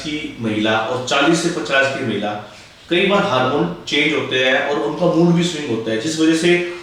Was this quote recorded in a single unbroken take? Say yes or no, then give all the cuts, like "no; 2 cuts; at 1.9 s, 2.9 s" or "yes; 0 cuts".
yes; 0 cuts